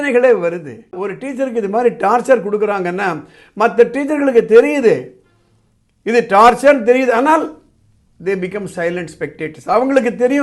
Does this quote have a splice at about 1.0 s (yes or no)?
yes